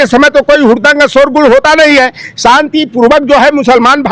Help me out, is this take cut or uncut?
uncut